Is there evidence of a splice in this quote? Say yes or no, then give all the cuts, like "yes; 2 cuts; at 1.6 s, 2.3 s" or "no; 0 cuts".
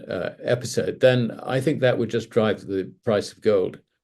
no; 0 cuts